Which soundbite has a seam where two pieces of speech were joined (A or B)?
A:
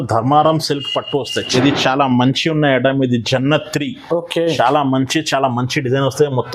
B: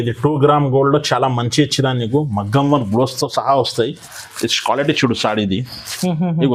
A